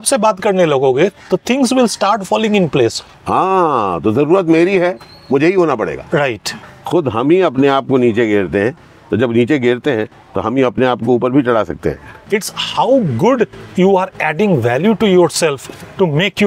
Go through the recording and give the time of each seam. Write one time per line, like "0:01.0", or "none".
0:03.1
0:06.6
0:12.1